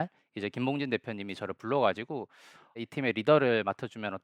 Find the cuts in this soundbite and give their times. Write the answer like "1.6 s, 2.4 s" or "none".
2.8 s